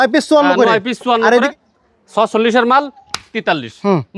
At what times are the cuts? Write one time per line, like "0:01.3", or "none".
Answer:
0:01.5